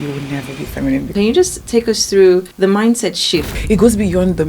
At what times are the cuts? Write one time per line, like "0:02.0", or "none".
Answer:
0:01.1
0:03.5